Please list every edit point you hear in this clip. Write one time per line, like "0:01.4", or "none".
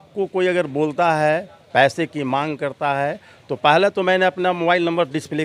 none